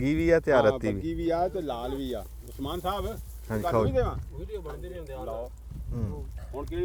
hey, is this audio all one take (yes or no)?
yes